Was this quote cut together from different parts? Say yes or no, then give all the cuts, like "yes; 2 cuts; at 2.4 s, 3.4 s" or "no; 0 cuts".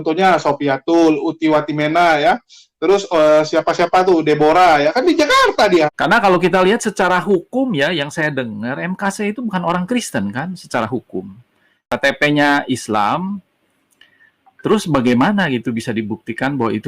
yes; 2 cuts; at 5.9 s, 11.9 s